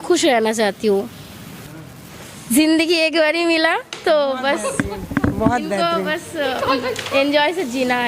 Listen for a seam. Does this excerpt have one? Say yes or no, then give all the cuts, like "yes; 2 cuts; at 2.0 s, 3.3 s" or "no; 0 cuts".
no; 0 cuts